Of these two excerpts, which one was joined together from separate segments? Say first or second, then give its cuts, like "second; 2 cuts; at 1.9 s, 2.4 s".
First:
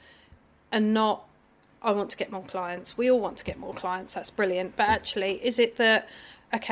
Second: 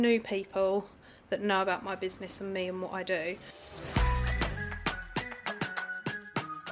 second; 1 cut; at 3.8 s